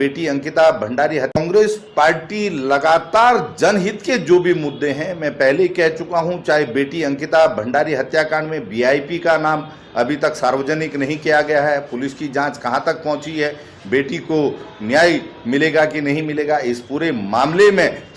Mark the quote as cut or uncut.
cut